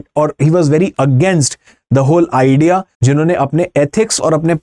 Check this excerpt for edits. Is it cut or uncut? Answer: cut